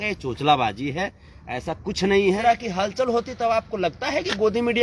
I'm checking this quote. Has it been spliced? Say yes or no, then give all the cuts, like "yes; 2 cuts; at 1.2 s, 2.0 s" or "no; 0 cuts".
yes; 1 cut; at 2.4 s